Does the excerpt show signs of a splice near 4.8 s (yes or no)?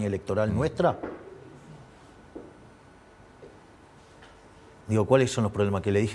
yes